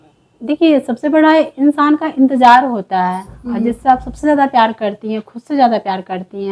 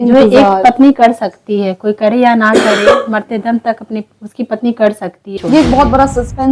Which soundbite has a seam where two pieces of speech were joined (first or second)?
second